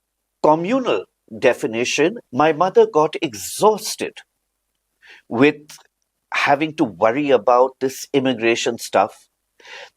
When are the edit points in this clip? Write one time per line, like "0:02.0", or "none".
0:02.2